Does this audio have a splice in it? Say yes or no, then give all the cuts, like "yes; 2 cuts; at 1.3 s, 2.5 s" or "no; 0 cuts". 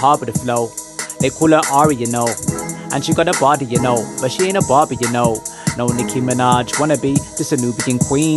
no; 0 cuts